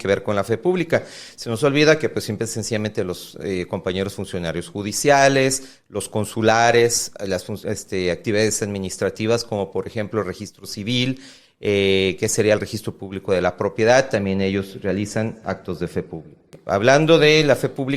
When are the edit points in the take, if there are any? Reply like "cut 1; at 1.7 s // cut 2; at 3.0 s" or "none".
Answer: cut 1; at 16.6 s